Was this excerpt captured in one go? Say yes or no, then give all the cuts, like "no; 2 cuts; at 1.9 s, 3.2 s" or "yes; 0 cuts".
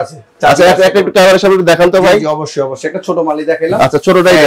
yes; 0 cuts